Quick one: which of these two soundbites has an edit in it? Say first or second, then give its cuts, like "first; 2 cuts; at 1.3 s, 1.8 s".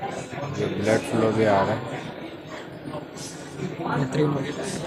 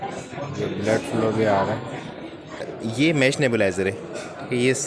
second; 1 cut; at 2.7 s